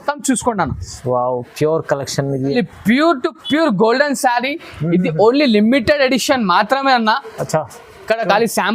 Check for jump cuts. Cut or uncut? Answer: cut